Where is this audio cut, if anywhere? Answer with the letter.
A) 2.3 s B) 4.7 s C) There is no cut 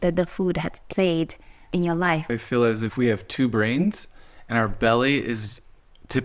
A